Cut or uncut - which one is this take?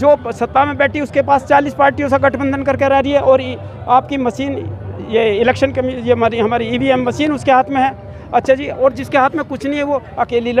uncut